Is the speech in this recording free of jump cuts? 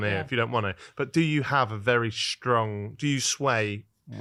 yes; 0 cuts

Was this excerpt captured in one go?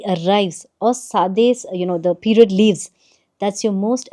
yes; 0 cuts

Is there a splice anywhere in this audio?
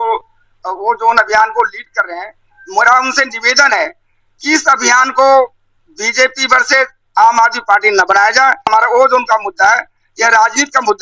yes; 1 cut; at 8.7 s

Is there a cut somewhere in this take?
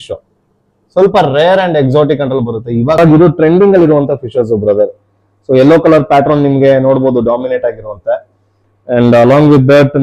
yes; 1 cut; at 3.0 s

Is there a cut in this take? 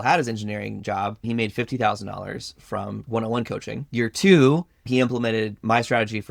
yes; 4 cuts; at 1.2 s, 3.0 s, 3.8 s, 4.9 s

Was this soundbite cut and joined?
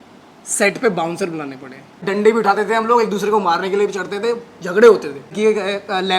yes; 2 cuts; at 2.0 s, 5.3 s

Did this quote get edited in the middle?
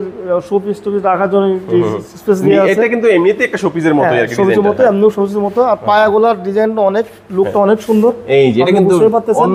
no; 0 cuts

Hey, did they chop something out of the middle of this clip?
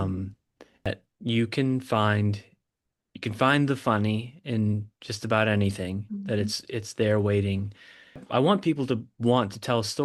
yes; 2 cuts; at 0.9 s, 8.2 s

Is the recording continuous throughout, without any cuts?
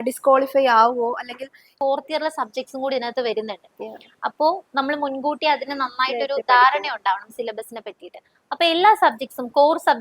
no; 1 cut; at 1.7 s

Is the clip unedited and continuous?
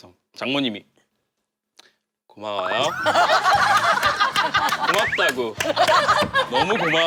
yes; 0 cuts

